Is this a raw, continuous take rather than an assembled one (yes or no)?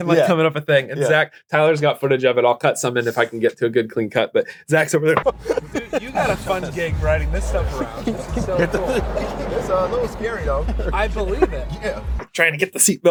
yes